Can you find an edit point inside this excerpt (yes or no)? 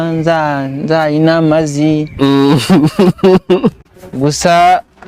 yes